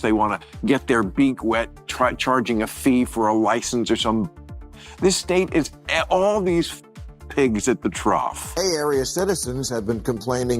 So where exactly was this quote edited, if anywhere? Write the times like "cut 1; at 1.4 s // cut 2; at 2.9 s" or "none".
cut 1; at 8.4 s